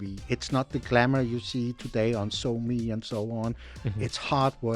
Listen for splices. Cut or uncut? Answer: cut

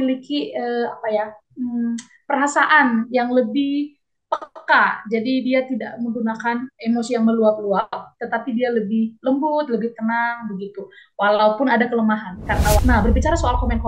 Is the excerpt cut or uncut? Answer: cut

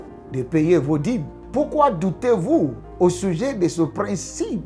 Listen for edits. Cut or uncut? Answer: cut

